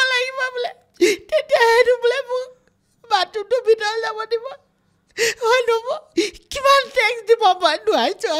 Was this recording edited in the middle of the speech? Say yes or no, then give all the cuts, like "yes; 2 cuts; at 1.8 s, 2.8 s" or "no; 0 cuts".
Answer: no; 0 cuts